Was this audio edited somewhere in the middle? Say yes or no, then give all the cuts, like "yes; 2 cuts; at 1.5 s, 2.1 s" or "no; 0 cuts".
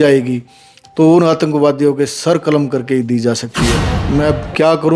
yes; 1 cut; at 3.9 s